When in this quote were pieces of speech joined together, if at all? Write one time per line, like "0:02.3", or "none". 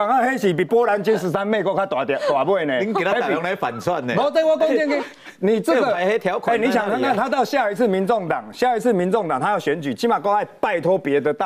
none